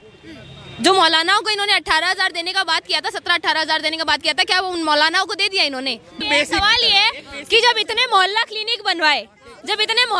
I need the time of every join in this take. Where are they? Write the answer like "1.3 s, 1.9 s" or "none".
6.2 s